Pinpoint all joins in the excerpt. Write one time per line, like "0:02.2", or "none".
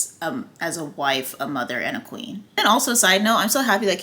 0:02.5